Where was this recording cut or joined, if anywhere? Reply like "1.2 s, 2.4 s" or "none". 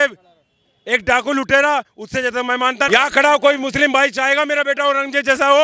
2.9 s